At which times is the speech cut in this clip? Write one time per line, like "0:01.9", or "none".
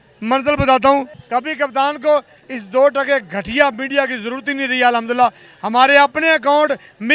0:01.2